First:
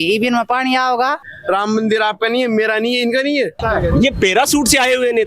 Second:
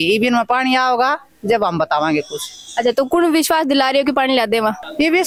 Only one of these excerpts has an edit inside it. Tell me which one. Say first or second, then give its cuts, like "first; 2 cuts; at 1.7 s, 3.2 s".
first; 2 cuts; at 1.3 s, 3.6 s